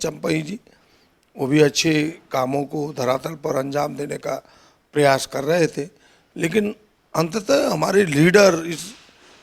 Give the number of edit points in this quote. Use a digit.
0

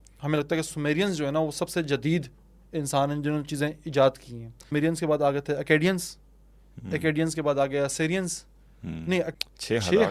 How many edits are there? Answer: 2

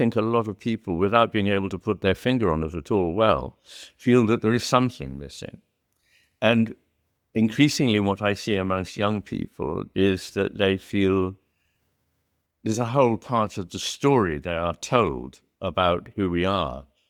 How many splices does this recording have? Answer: 0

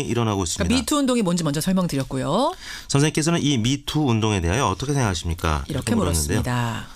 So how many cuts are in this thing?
1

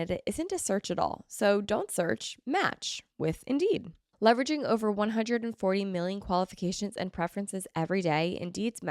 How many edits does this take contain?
1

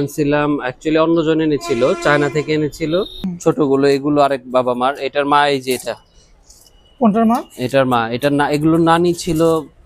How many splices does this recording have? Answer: 1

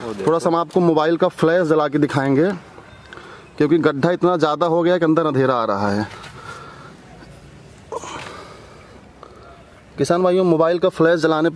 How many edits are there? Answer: 0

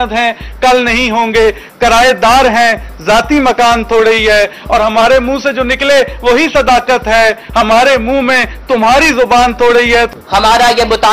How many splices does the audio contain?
1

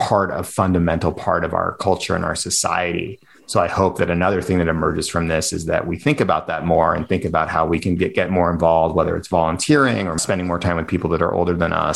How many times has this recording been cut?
1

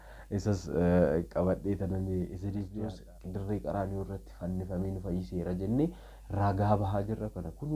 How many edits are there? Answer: 1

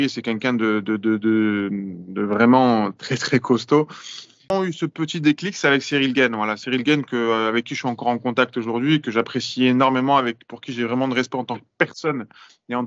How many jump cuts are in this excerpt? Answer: 1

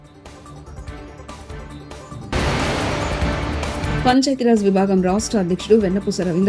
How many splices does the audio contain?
1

